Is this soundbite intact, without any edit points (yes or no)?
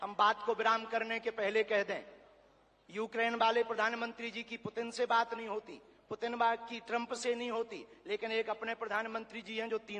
yes